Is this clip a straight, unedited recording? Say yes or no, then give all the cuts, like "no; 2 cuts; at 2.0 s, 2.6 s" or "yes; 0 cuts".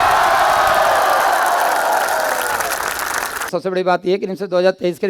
no; 1 cut; at 3.4 s